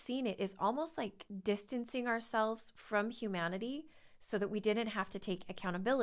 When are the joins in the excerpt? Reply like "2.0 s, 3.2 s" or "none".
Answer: 1.3 s